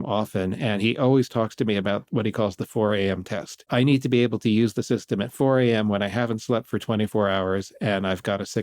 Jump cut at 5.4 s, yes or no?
no